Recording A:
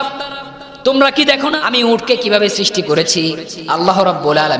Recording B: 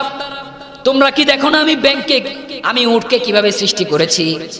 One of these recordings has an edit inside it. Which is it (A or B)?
A